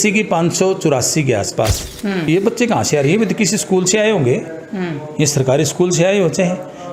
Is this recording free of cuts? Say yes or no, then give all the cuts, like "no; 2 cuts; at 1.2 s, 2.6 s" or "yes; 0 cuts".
no; 1 cut; at 2.3 s